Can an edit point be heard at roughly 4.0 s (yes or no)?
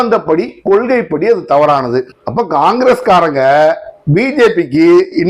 no